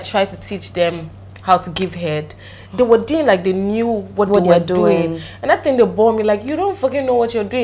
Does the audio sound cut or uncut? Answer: uncut